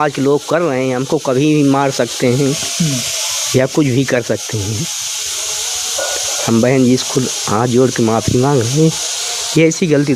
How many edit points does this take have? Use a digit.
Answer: 0